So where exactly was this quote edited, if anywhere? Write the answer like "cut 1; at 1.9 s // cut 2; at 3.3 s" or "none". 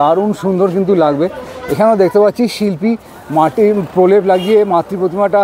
none